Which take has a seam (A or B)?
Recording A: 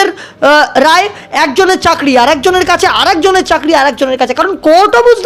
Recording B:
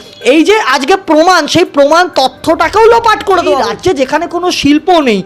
B